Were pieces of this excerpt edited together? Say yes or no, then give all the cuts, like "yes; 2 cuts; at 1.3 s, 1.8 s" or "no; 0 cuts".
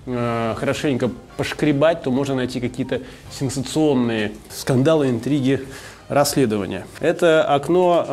yes; 2 cuts; at 4.5 s, 6.8 s